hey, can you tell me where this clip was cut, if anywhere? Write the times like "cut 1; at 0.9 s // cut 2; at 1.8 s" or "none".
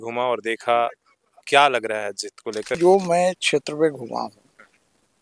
cut 1; at 2.8 s